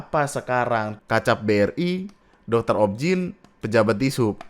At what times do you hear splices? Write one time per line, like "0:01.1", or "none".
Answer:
0:00.9

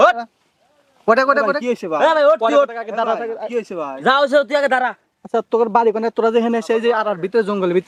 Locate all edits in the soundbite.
none

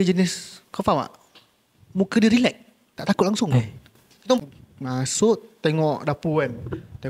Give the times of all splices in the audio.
0:04.4

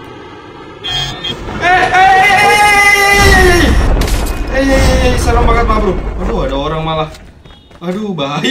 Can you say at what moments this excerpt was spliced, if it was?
none

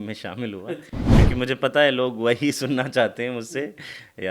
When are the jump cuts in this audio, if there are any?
0:01.0

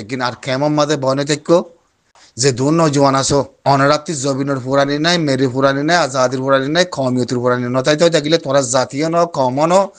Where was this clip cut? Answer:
0:03.5

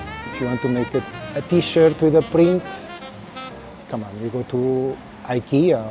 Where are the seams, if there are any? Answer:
0:01.0

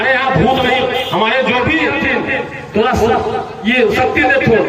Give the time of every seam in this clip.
0:01.9

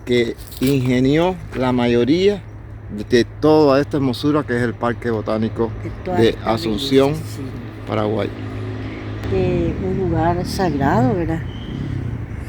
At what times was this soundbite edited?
0:09.2

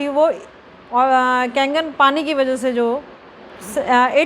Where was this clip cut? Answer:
none

